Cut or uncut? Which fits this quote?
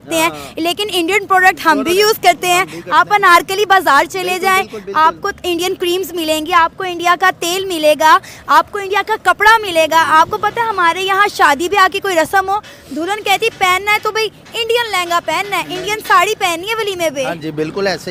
uncut